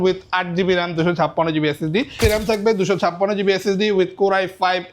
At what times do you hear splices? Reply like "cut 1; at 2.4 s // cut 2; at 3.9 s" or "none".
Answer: cut 1; at 2.2 s